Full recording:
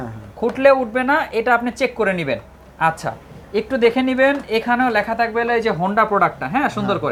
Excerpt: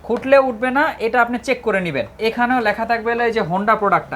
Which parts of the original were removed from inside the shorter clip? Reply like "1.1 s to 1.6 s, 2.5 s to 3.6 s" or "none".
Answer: 2.5 s to 4.4 s